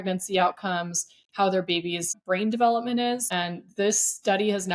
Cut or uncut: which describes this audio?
cut